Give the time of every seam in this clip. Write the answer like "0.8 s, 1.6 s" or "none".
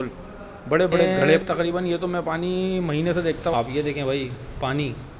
1.4 s, 3.5 s